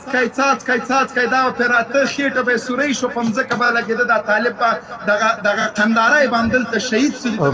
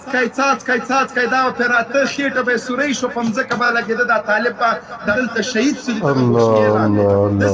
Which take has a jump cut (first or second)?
second